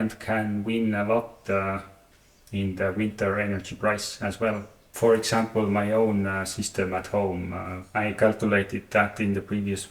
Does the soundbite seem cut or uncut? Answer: uncut